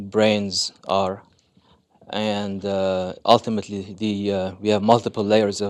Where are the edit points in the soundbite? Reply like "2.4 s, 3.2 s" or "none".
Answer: none